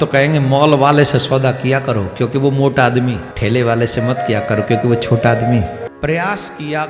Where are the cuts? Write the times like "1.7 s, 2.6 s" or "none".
3.3 s, 5.8 s